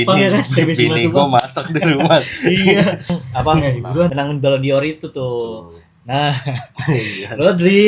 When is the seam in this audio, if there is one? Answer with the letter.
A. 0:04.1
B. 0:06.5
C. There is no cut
A